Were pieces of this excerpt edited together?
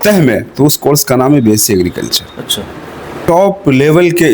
yes; 1 cut; at 3.2 s

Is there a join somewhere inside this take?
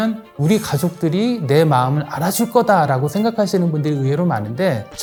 no; 0 cuts

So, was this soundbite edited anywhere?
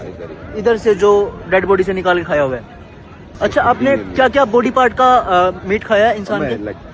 yes; 1 cut; at 3.3 s

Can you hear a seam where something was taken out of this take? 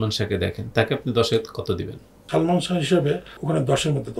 yes; 2 cuts; at 2.1 s, 3.3 s

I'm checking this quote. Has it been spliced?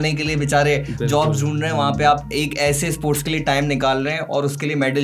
no; 0 cuts

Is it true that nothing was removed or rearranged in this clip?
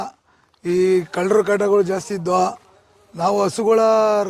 yes; 0 cuts

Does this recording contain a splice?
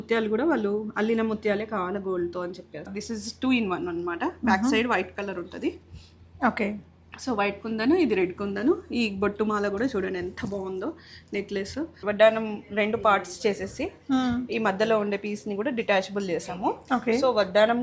yes; 2 cuts; at 2.9 s, 12.0 s

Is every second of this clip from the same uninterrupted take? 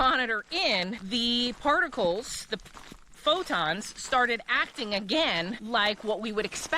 no; 2 cuts; at 1.0 s, 5.6 s

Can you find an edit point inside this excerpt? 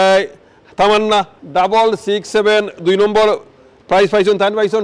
yes; 1 cut; at 1.4 s

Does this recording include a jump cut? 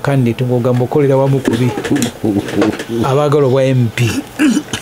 no; 0 cuts

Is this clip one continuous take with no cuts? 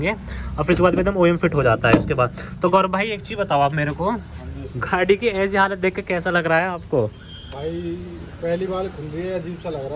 yes; 0 cuts

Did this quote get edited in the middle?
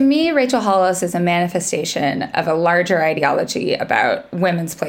no; 0 cuts

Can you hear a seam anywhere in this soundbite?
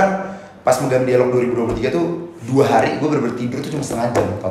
no; 0 cuts

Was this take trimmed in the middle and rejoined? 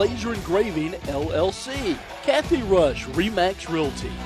yes; 1 cut; at 2.1 s

